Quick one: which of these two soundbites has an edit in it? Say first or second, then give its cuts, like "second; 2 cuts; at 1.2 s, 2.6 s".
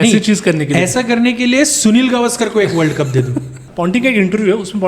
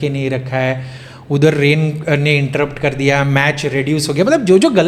first; 1 cut; at 3.6 s